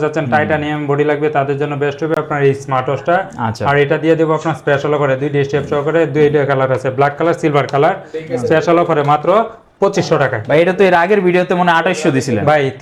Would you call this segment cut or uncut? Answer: uncut